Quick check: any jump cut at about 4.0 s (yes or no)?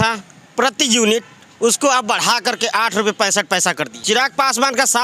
yes